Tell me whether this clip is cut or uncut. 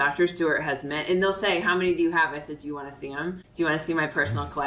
cut